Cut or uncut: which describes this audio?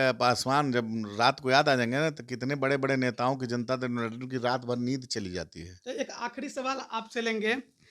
uncut